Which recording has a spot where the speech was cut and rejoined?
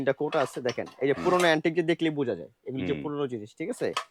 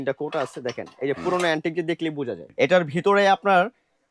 second; 1 cut; at 2.4 s

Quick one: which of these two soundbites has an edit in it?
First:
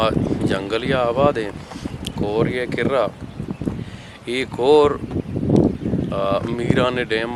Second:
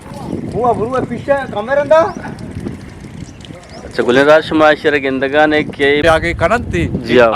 second; 1 cut; at 6.0 s

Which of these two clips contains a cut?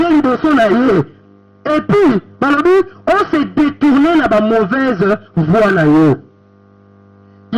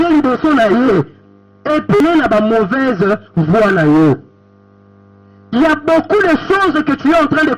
second; 1 cut; at 2.0 s

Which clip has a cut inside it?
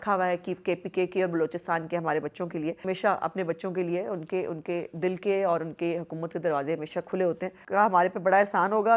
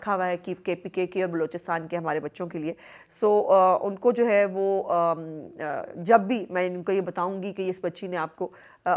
first; 2 cuts; at 2.8 s, 7.5 s

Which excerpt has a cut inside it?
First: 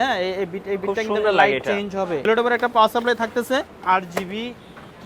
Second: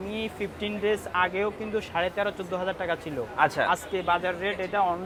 first; 2 cuts; at 2.3 s, 3.7 s

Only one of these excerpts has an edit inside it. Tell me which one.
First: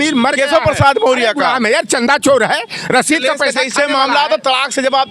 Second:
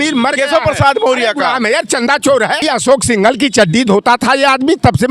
second; 1 cut; at 2.6 s

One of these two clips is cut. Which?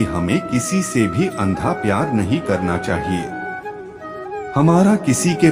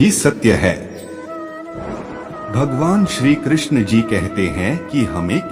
second; 2 cuts; at 1.1 s, 2.5 s

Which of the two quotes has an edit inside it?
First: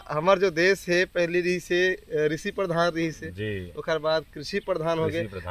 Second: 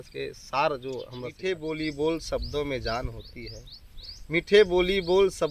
second; 1 cut; at 1.4 s

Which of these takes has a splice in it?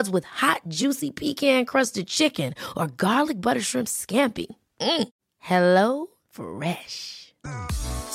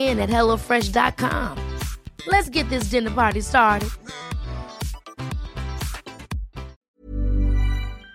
second; 1 cut; at 6.8 s

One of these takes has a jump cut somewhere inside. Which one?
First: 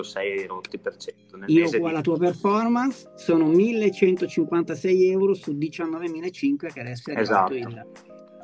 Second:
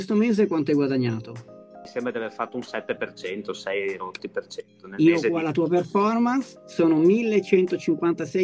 second; 1 cut; at 1.9 s

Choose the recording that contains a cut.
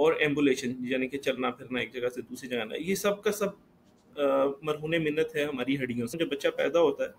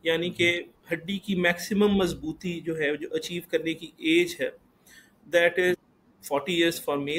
first; 1 cut; at 6.2 s

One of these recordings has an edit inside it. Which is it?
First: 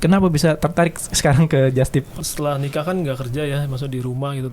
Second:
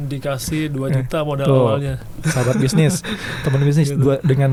first; 1 cut; at 2.2 s

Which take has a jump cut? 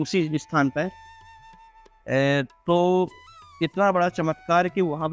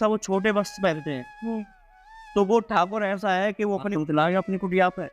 second; 1 cut; at 3.9 s

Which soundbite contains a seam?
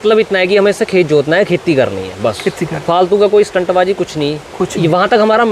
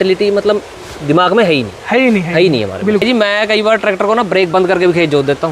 second; 1 cut; at 3.0 s

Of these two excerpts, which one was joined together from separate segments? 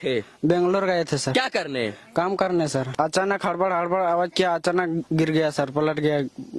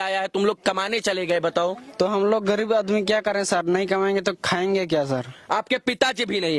first; 1 cut; at 2.9 s

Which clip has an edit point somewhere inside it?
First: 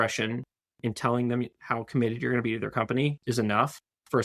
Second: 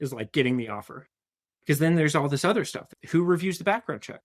first; 1 cut; at 3.2 s

